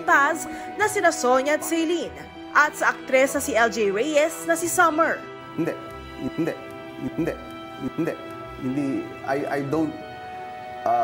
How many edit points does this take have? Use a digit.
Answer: 0